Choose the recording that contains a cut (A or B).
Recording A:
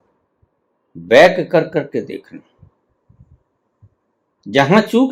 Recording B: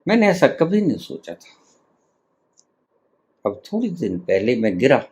B